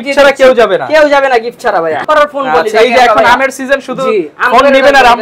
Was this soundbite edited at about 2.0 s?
yes; 1 cut; at 2.0 s

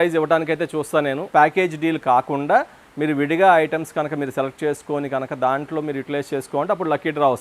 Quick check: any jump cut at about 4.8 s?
no; 1 cut; at 1.2 s

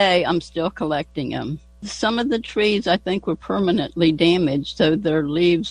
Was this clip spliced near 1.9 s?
yes; 1 cut; at 1.9 s

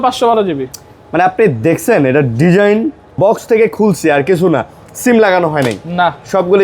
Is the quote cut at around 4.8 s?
no; 1 cut; at 3.0 s

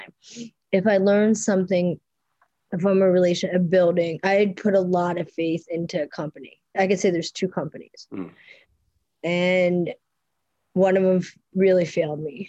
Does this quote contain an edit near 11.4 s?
yes; 1 cut; at 11.4 s

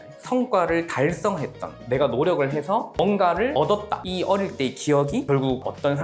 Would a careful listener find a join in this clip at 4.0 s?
yes; 1 cut; at 4.0 s

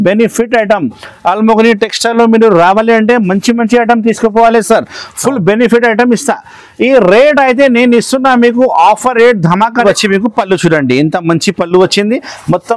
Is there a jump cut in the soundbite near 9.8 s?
yes; 1 cut; at 9.8 s

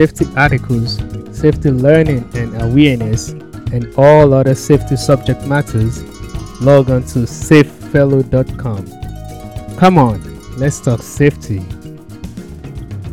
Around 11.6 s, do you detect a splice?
yes; 1 cut; at 11.6 s

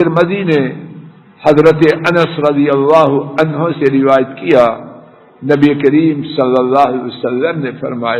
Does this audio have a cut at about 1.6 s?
no; 0 cuts

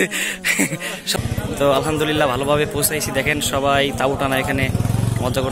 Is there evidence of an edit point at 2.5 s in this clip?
no; 1 cut; at 1.1 s

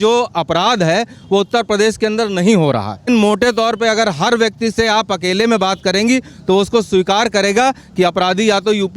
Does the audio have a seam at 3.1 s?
yes; 1 cut; at 3.1 s

